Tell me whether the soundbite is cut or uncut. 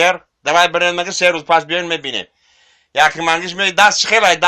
uncut